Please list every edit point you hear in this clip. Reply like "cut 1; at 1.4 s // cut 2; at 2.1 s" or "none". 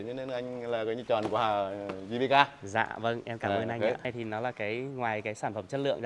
cut 1; at 4.0 s

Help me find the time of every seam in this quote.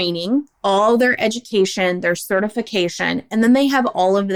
none

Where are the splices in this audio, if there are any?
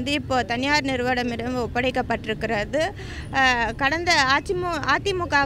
none

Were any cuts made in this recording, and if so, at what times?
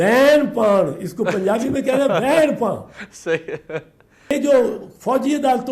cut 1; at 4.3 s

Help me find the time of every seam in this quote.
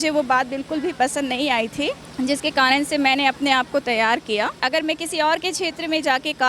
cut 1; at 2.0 s // cut 2; at 4.6 s

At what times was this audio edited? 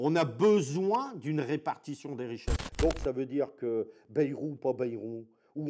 cut 1; at 2.6 s

